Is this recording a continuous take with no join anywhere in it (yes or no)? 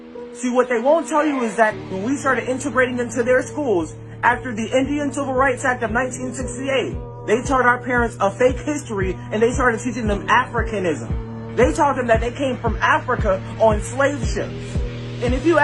yes